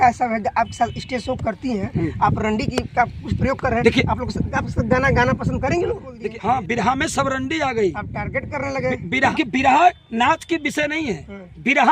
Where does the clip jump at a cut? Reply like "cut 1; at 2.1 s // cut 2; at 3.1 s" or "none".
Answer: cut 1; at 6.1 s // cut 2; at 9.3 s